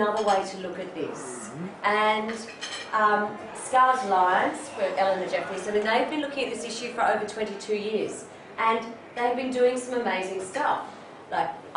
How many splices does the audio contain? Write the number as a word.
one